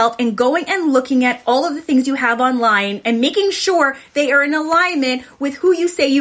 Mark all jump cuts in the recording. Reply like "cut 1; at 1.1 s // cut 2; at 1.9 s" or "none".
none